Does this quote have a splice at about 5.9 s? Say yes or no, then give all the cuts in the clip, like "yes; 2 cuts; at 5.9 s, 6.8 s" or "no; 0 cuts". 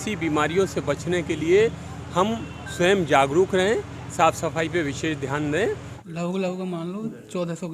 yes; 1 cut; at 5.9 s